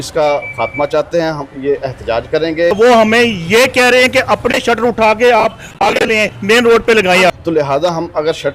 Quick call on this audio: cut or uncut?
cut